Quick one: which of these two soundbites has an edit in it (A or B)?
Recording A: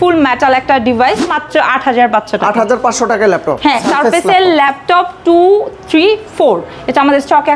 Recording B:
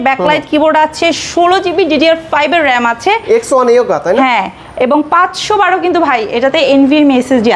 A